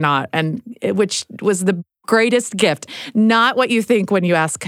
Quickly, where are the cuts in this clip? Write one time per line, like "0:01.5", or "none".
0:02.8